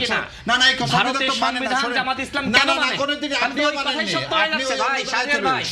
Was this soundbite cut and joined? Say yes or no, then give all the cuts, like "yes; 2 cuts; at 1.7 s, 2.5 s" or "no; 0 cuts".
no; 0 cuts